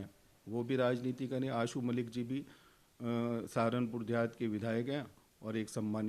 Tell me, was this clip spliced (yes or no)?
no